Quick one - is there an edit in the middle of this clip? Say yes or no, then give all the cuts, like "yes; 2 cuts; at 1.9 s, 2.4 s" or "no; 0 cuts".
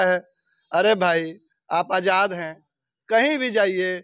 no; 0 cuts